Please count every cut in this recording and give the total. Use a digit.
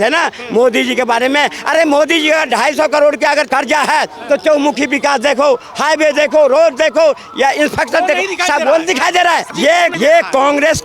2